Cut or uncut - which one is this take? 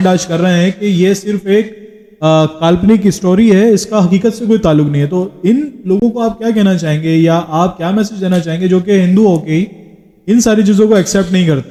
uncut